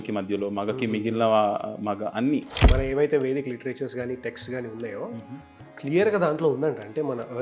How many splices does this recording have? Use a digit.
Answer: 1